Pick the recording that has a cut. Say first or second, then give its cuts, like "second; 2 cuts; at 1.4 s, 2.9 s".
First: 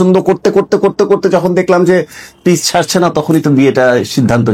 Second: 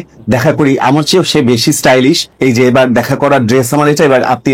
second; 1 cut; at 2.3 s